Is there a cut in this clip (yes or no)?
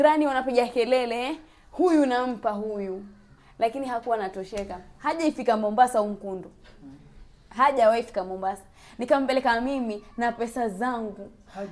yes